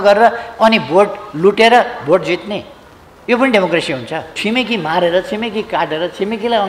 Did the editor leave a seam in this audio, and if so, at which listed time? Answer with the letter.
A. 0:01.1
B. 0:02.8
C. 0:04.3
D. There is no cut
C